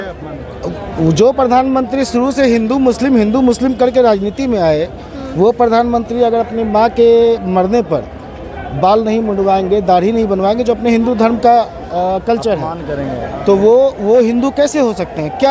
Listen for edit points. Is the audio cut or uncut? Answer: uncut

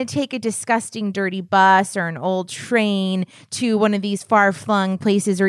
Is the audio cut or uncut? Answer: uncut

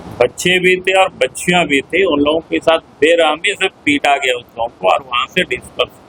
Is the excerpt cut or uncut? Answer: uncut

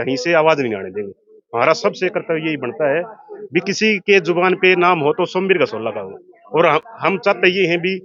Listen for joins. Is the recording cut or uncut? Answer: uncut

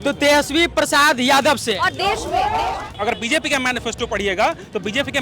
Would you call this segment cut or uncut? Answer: cut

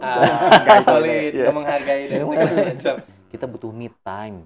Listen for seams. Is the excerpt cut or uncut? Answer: cut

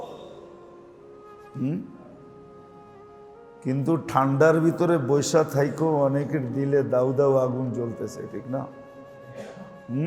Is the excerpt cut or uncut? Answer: uncut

